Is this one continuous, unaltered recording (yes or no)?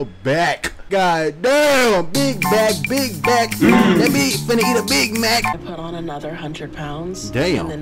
no